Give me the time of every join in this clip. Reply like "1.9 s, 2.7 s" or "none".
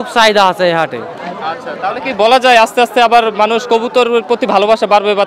none